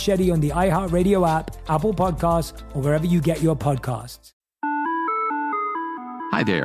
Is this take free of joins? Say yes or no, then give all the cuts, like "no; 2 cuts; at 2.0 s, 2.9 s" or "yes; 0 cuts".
yes; 0 cuts